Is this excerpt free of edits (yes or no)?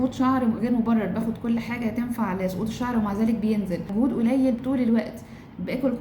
no